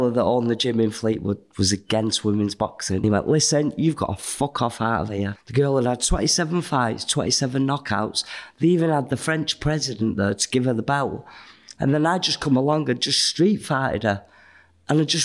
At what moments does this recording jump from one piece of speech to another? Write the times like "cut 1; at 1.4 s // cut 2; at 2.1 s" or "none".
cut 1; at 3.0 s // cut 2; at 5.4 s